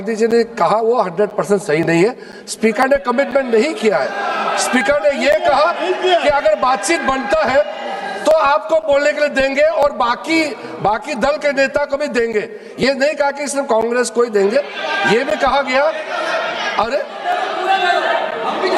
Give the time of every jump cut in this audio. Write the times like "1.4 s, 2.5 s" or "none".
none